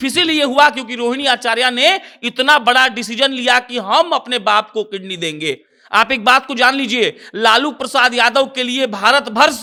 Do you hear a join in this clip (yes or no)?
no